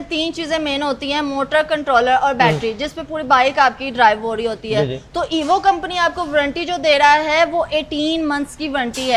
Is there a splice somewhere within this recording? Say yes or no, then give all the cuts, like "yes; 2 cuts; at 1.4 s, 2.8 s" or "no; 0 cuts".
no; 0 cuts